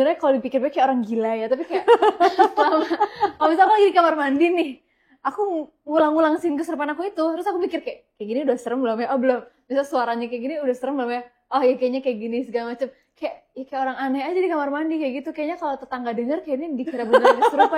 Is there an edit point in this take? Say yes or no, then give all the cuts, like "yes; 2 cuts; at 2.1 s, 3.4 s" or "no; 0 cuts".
no; 0 cuts